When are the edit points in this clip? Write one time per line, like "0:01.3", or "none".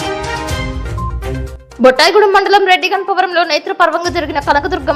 0:01.5